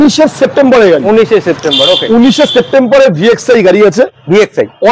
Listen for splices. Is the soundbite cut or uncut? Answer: uncut